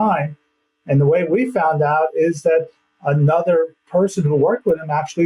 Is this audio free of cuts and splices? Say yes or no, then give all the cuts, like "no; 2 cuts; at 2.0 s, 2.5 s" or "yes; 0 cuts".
yes; 0 cuts